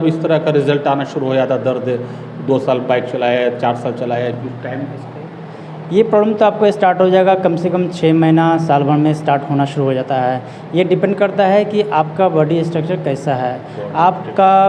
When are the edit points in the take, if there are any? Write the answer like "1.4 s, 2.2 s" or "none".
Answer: none